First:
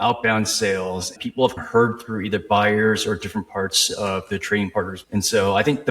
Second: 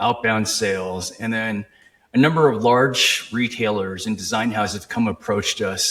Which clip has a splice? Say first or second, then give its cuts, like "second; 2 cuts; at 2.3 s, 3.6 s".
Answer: first; 2 cuts; at 1.2 s, 5.0 s